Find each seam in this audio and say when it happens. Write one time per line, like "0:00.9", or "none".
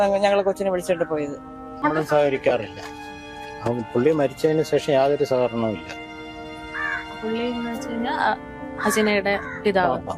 0:01.6